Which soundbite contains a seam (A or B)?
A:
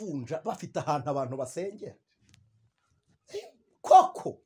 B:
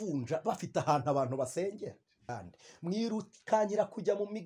B